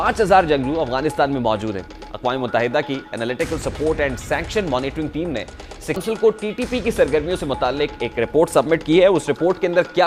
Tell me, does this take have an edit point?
no; 0 cuts

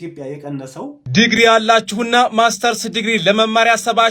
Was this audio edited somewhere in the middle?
yes; 1 cut; at 1.0 s

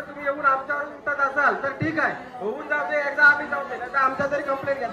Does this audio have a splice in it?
no; 0 cuts

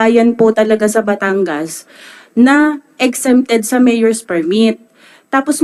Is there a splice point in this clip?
no; 0 cuts

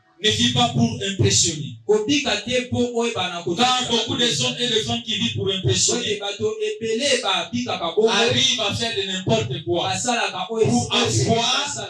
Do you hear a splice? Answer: no; 0 cuts

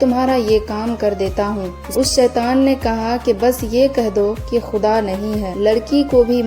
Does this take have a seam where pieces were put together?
yes; 2 cuts; at 1.8 s, 5.5 s

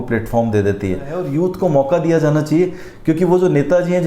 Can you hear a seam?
yes; 1 cut; at 1.3 s

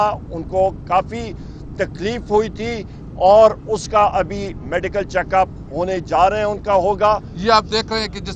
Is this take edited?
yes; 1 cut; at 7.3 s

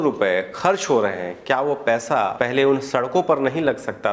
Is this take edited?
yes; 1 cut; at 2.3 s

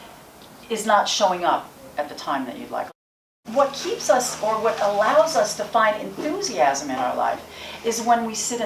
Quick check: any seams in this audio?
yes; 1 cut; at 2.9 s

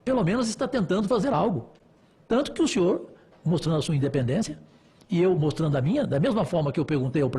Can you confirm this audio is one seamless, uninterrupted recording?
yes; 0 cuts

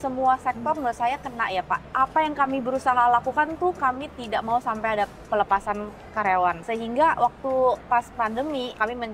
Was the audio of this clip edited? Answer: no; 0 cuts

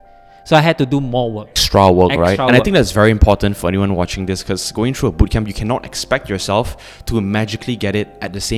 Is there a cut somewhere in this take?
no; 0 cuts

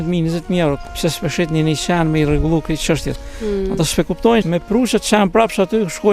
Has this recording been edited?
yes; 2 cuts; at 0.9 s, 4.4 s

